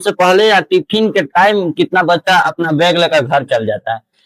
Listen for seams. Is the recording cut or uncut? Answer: uncut